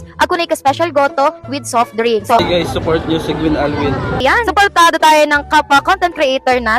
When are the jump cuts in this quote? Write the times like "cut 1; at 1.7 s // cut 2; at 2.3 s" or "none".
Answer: cut 1; at 2.4 s // cut 2; at 4.2 s